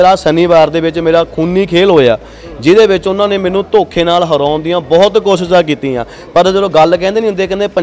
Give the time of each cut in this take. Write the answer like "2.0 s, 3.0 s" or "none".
none